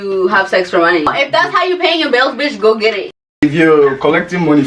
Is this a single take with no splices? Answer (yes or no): no